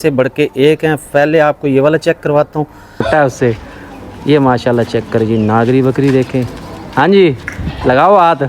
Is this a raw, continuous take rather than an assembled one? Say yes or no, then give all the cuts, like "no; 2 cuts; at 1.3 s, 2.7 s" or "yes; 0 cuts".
no; 1 cut; at 3.0 s